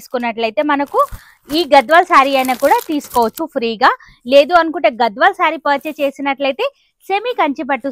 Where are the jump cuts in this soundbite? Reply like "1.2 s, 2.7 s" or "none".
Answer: none